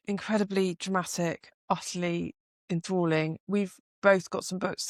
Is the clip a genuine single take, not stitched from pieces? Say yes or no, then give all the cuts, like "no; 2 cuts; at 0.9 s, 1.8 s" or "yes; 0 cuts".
yes; 0 cuts